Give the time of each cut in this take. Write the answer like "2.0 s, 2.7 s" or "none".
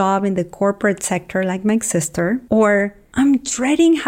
2.4 s